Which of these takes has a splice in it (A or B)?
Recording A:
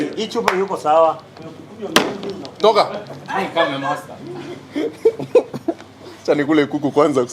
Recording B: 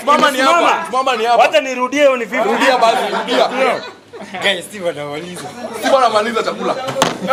A